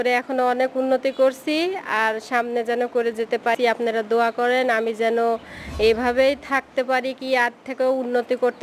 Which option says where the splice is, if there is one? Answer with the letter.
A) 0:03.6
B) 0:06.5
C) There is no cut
A